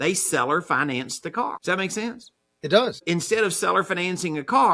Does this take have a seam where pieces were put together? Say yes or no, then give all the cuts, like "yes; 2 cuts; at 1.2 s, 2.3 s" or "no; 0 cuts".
yes; 2 cuts; at 1.6 s, 3.0 s